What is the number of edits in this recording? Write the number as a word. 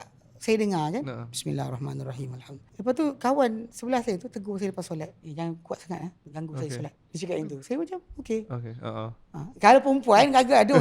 four